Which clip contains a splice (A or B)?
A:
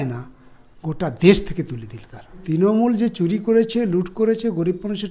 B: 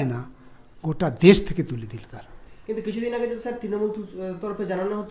A